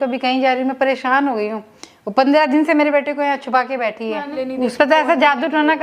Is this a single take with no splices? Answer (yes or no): no